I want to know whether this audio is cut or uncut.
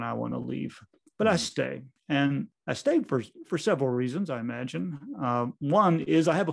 cut